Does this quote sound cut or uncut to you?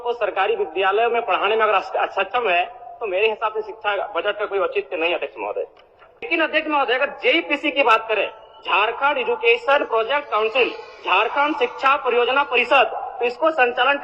cut